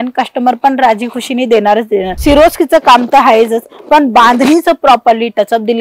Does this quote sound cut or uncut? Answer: cut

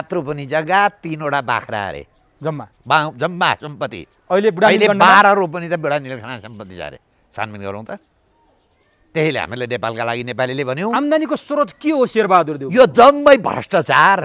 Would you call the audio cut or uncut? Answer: uncut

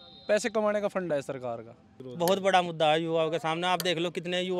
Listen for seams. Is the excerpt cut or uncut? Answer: cut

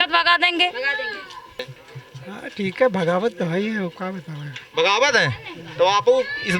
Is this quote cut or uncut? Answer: cut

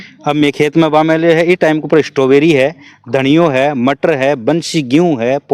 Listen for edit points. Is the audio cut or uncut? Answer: uncut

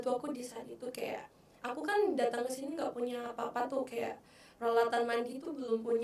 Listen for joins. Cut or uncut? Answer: uncut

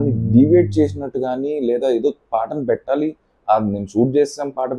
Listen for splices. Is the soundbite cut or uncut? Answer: uncut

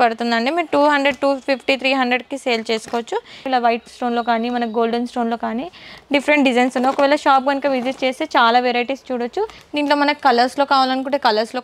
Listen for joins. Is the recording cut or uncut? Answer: cut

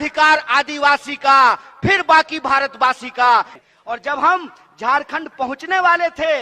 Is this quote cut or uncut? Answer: cut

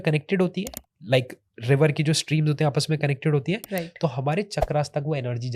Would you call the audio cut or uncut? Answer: uncut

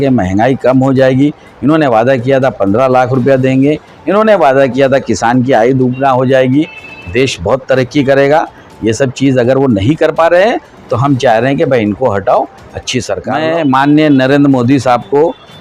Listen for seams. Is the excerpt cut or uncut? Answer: cut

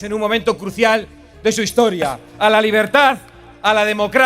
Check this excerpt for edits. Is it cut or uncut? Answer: cut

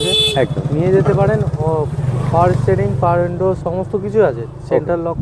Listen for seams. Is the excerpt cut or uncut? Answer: uncut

